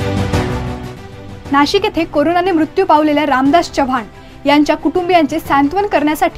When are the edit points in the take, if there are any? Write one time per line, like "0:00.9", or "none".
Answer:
0:01.0